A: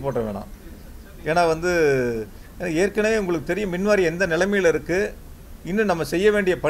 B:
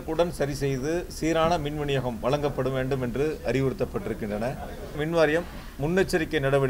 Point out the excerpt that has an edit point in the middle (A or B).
B